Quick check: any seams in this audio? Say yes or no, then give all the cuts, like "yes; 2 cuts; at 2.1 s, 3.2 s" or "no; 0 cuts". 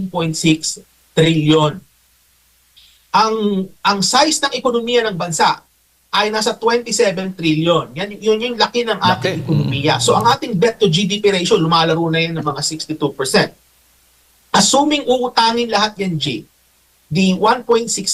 no; 0 cuts